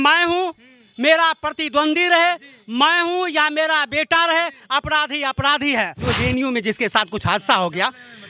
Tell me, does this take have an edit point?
yes; 1 cut; at 6.0 s

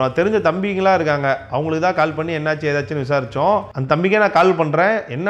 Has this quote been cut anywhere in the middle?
no; 0 cuts

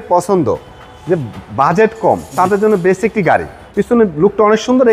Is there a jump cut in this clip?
yes; 1 cut; at 3.6 s

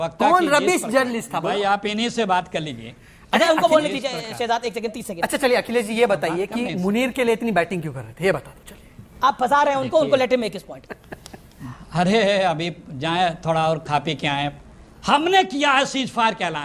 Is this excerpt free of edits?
yes; 0 cuts

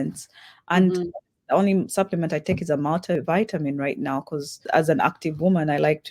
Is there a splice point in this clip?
yes; 2 cuts; at 3.1 s, 4.6 s

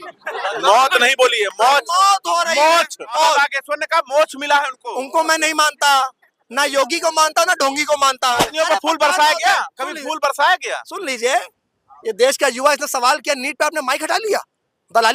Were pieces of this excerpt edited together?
yes; 2 cuts; at 3.2 s, 8.5 s

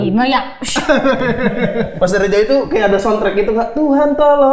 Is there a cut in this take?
no; 0 cuts

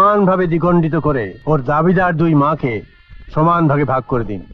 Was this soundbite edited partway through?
yes; 1 cut; at 1.3 s

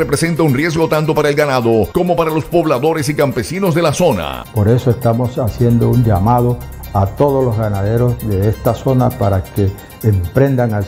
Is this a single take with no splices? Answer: no; 1 cut; at 4.4 s

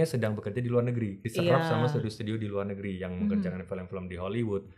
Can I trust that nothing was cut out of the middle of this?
no; 1 cut; at 1.2 s

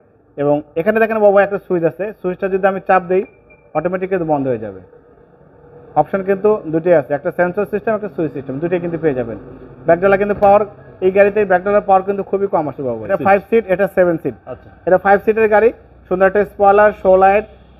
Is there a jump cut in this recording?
yes; 1 cut; at 13.1 s

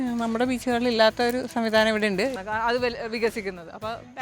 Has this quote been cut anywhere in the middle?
yes; 1 cut; at 2.4 s

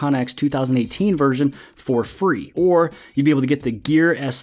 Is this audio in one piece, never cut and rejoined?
no; 1 cut; at 2.5 s

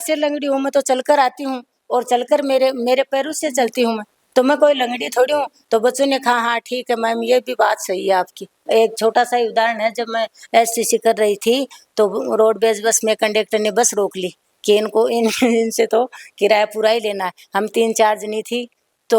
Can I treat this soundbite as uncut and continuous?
yes; 0 cuts

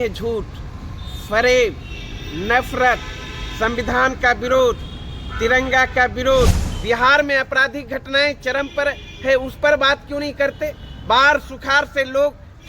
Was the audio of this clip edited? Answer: yes; 1 cut; at 6.7 s

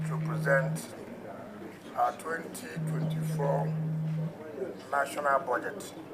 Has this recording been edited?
no; 0 cuts

